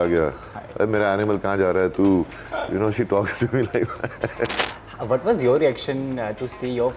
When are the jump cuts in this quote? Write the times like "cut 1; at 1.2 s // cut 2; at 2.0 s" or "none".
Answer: cut 1; at 4.5 s